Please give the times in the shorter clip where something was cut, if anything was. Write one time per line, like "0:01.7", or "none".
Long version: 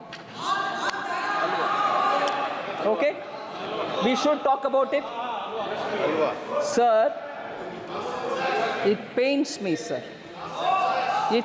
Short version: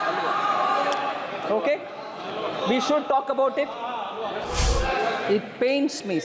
0:04.4